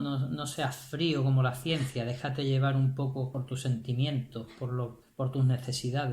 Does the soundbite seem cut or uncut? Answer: cut